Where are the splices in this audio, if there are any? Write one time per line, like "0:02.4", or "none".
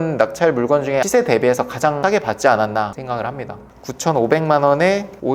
0:01.0
0:02.0
0:03.6

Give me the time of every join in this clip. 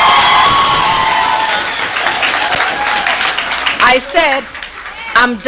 none

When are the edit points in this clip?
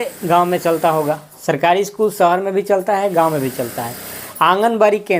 none

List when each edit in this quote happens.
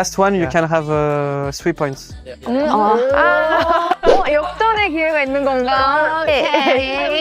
none

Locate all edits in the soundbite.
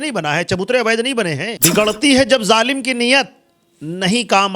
0:01.5

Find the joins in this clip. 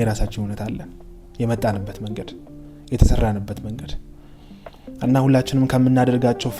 none

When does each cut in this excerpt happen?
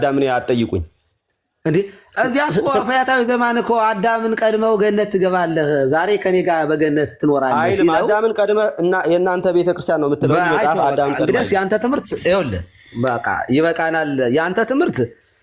none

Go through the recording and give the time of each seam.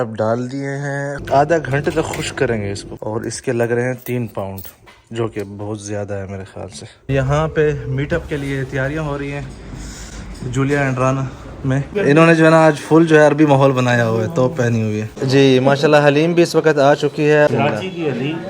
0:01.2
0:02.9
0:07.1
0:11.9
0:15.1
0:17.5

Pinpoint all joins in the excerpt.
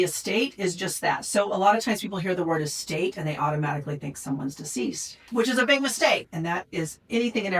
0:05.2
0:06.3

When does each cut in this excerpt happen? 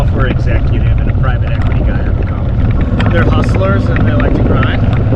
0:02.8

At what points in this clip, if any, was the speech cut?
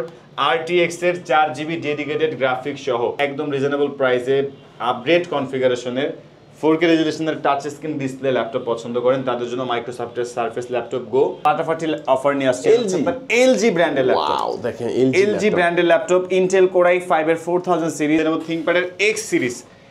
0:03.2
0:11.4
0:18.2

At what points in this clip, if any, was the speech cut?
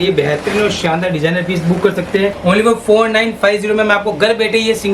0:02.4

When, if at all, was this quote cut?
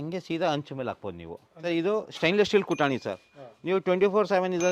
0:01.5

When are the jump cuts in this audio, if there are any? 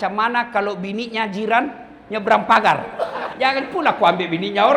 0:03.2

